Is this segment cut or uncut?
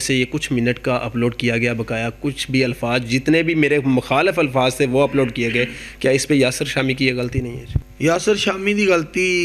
uncut